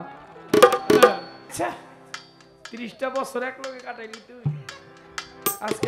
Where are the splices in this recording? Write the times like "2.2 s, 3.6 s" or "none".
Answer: 1.5 s